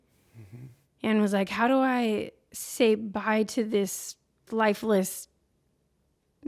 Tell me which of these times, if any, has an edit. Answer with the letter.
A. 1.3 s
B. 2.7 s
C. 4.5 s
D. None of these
C